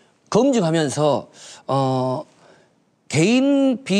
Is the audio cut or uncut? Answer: cut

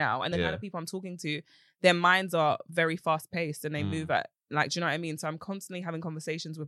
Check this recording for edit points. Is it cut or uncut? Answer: uncut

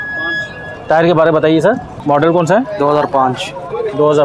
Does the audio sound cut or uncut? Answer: cut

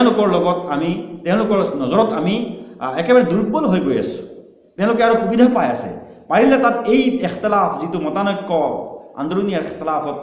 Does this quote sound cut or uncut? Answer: uncut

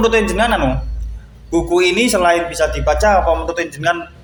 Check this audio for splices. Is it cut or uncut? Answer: uncut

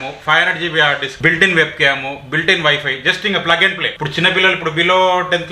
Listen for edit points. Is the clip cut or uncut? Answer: cut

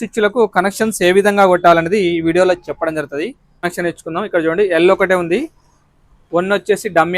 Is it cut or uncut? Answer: cut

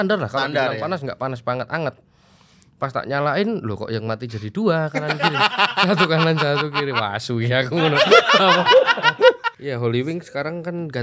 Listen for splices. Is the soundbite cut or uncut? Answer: cut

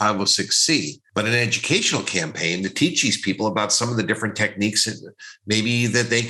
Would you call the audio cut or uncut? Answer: cut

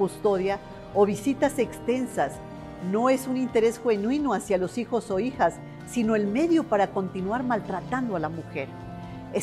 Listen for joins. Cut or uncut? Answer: cut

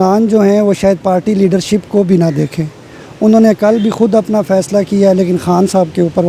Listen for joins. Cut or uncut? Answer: uncut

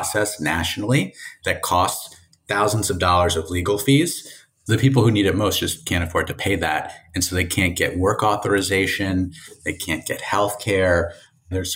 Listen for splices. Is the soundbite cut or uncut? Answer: uncut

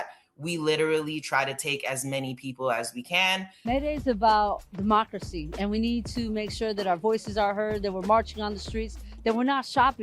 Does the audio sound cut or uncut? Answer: cut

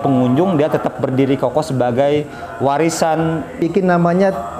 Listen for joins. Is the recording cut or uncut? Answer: cut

